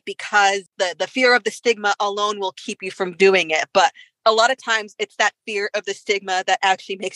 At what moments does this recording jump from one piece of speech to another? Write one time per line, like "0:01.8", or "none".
none